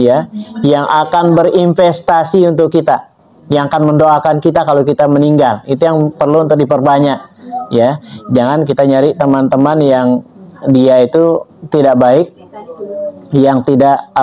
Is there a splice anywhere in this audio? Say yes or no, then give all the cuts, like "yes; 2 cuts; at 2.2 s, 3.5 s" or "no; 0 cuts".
no; 0 cuts